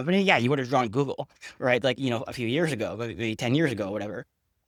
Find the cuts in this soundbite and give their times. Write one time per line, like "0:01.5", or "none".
none